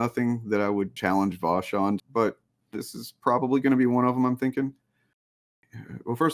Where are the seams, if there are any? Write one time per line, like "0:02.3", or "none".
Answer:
0:01.0
0:02.0
0:05.3